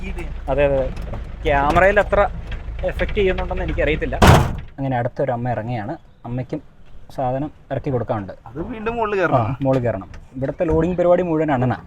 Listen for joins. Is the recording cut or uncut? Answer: cut